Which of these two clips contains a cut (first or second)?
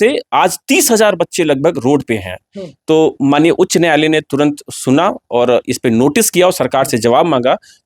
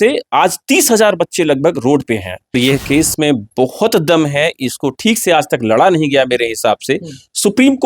second